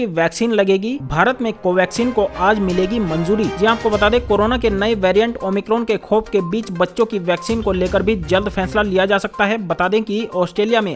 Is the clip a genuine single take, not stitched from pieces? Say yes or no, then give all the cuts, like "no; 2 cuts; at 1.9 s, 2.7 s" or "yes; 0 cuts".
yes; 0 cuts